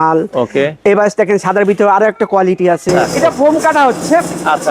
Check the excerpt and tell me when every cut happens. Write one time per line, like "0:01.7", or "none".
0:03.1